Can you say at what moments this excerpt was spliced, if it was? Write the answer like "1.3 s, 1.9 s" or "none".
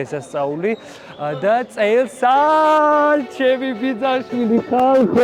none